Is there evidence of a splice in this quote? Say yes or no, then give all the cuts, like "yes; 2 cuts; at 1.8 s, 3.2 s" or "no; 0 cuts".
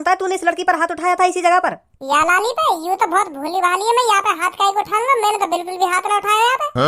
yes; 1 cut; at 1.9 s